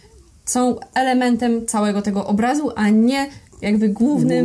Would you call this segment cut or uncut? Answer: uncut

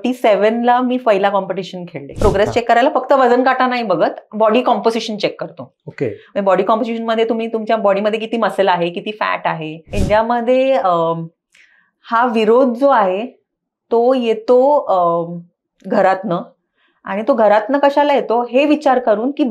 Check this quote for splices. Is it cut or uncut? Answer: cut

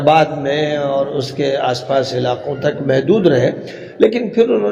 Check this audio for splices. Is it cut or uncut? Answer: uncut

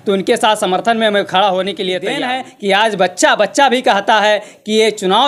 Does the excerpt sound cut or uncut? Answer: cut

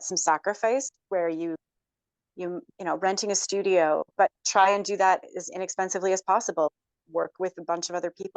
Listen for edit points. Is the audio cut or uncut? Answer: uncut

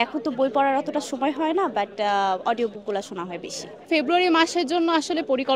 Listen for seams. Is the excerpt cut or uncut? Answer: uncut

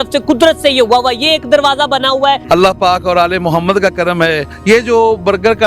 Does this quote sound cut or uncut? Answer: cut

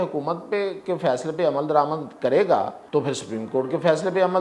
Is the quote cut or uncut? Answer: cut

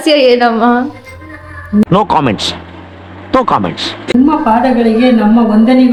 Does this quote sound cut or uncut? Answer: uncut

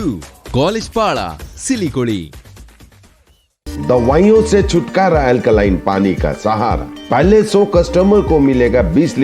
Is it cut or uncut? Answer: uncut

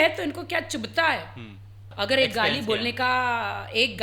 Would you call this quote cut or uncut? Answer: cut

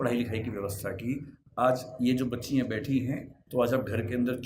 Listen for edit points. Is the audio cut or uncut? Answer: cut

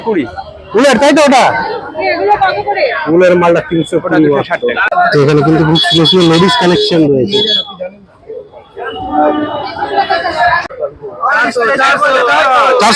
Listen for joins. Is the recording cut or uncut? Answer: cut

